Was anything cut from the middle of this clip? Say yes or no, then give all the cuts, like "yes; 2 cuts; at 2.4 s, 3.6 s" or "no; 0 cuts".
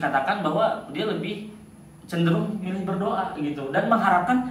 no; 0 cuts